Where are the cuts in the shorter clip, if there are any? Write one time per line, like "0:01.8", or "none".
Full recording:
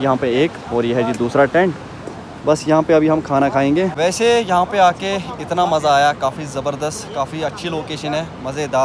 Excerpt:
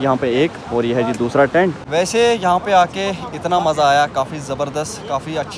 0:01.9